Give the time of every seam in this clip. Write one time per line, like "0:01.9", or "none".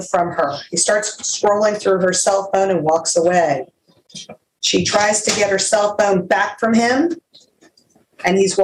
none